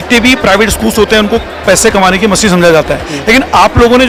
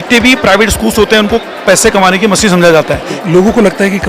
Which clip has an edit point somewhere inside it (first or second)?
second